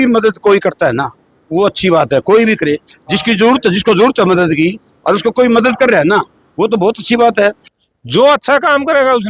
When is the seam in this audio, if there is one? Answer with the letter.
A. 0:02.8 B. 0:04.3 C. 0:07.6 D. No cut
C